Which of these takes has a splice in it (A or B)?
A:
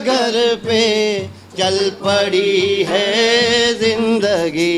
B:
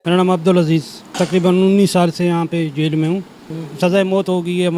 B